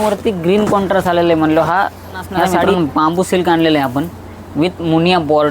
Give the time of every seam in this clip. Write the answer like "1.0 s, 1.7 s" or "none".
2.8 s